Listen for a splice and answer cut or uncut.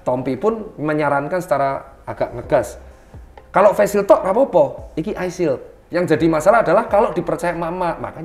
cut